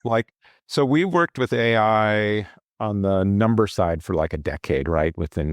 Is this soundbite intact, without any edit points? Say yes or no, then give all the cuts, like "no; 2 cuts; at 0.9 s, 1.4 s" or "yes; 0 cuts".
yes; 0 cuts